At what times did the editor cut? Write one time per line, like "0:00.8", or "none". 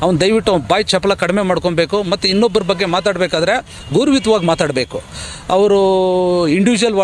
none